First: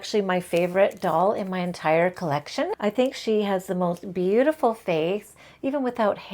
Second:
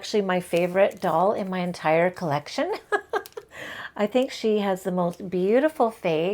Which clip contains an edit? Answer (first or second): first